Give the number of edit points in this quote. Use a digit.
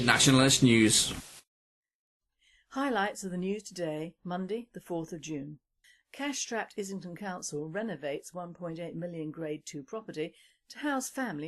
1